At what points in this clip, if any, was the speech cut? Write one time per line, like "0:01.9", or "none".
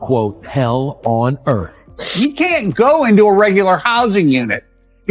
0:02.0